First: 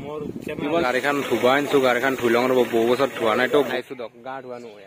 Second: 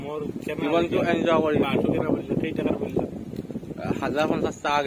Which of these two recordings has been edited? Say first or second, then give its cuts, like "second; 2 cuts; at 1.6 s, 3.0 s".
first; 2 cuts; at 0.8 s, 3.7 s